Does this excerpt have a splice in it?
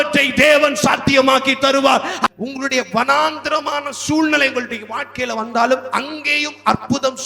yes; 1 cut; at 2.2 s

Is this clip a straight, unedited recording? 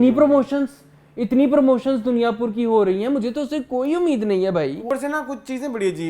no; 1 cut; at 4.9 s

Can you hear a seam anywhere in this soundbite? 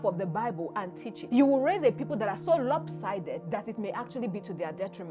yes; 1 cut; at 1.1 s

